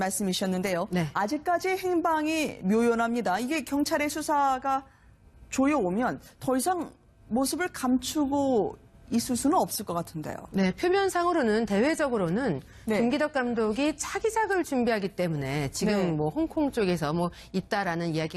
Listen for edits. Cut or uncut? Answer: cut